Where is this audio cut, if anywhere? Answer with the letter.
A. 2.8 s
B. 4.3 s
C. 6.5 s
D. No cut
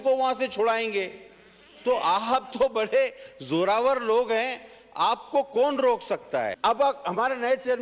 C